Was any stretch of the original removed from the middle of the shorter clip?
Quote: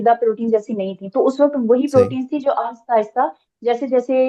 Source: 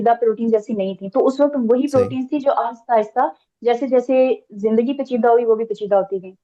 no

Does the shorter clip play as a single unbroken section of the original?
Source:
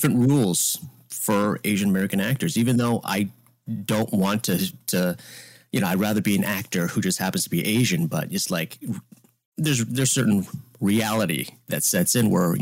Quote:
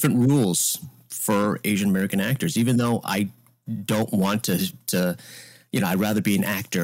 yes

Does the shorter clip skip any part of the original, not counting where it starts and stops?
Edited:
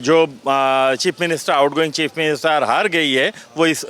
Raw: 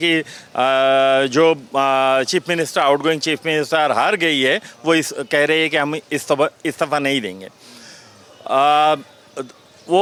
no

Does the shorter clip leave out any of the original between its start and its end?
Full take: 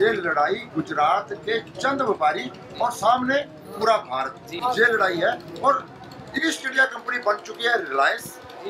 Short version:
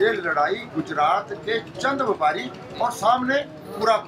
no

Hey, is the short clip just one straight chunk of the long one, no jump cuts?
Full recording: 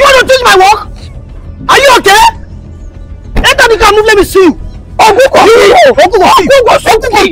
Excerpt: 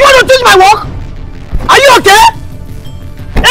yes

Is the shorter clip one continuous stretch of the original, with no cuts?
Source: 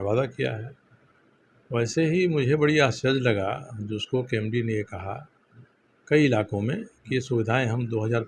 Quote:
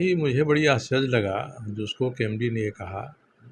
yes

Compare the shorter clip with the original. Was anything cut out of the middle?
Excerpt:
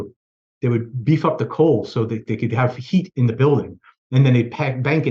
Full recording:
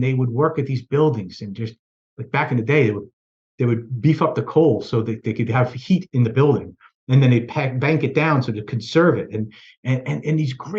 no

